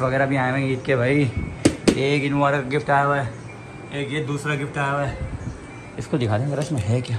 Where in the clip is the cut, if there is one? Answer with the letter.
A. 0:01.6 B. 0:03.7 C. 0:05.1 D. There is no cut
D